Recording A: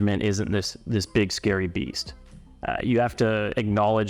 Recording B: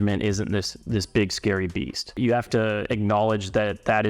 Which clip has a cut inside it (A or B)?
B